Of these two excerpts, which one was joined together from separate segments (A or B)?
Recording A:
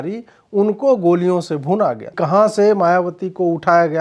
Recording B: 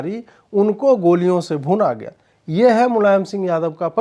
A